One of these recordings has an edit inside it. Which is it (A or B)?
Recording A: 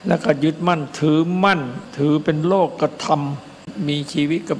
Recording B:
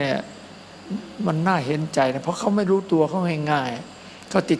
A